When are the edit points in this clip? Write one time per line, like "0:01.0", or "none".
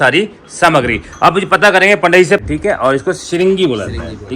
0:02.4